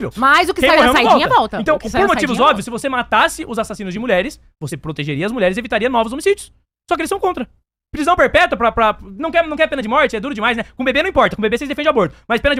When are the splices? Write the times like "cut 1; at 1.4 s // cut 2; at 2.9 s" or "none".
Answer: none